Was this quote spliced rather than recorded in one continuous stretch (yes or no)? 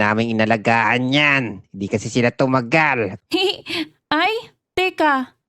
yes